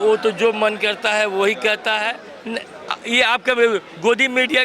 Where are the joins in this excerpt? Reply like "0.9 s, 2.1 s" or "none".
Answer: 2.2 s

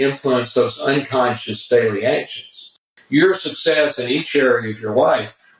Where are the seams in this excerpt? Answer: 2.8 s

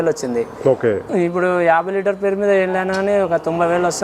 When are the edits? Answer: 1.0 s

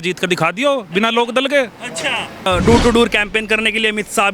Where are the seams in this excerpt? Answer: 2.5 s

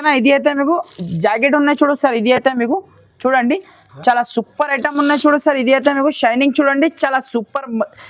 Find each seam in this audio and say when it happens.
none

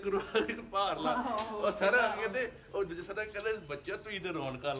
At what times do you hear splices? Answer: none

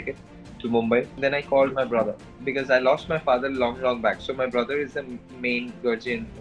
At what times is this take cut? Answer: 1.1 s

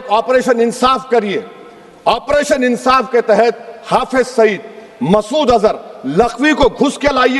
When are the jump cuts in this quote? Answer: none

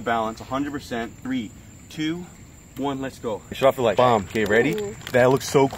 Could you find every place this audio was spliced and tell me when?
1.2 s, 3.6 s

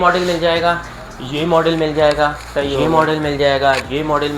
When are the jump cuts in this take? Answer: none

